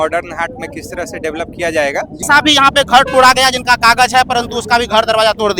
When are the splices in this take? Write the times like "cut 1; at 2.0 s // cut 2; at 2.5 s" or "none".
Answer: cut 1; at 2.2 s